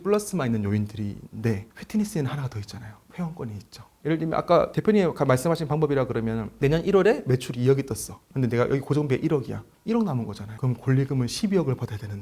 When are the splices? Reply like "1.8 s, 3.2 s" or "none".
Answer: 3.8 s

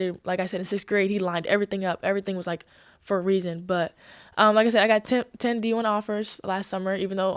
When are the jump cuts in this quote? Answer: none

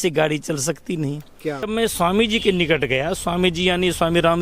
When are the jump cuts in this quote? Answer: 1.7 s

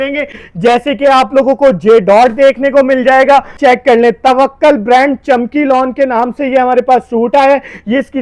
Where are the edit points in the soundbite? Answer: 3.6 s

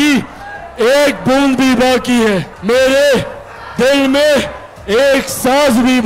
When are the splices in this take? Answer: 2.5 s

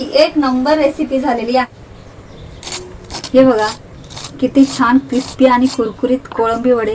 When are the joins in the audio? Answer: 1.7 s

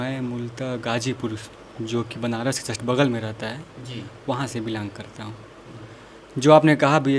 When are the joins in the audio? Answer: none

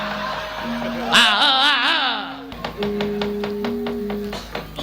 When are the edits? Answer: 2.6 s

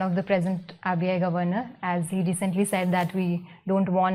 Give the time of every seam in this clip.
none

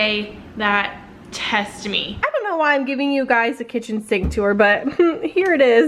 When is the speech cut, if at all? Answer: 2.3 s

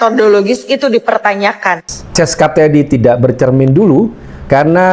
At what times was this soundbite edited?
1.8 s

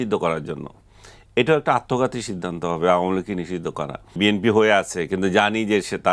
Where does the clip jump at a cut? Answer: 4.1 s

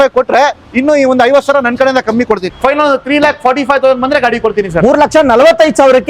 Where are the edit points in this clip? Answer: 2.5 s

